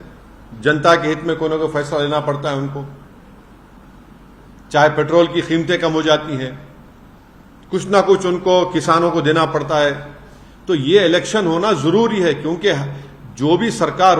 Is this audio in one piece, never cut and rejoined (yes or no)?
yes